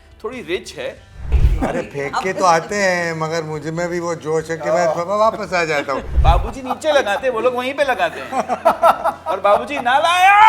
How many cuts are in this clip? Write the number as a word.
two